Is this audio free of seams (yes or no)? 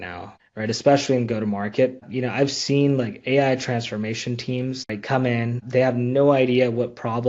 no